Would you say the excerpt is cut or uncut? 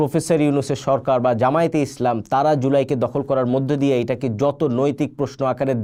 uncut